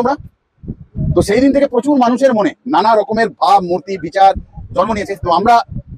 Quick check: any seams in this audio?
no; 0 cuts

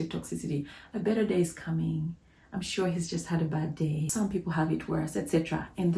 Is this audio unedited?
no; 1 cut; at 4.1 s

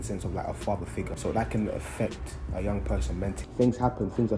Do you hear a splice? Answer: yes; 2 cuts; at 1.2 s, 3.4 s

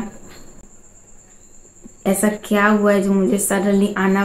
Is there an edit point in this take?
no; 0 cuts

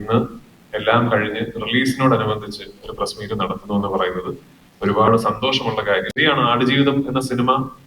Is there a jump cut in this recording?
yes; 1 cut; at 6.2 s

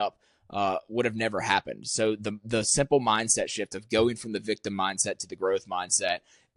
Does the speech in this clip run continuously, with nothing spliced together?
yes; 0 cuts

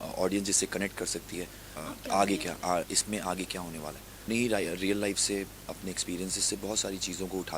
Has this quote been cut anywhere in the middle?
yes; 2 cuts; at 1.8 s, 4.2 s

